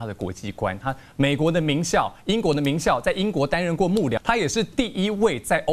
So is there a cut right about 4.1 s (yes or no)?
yes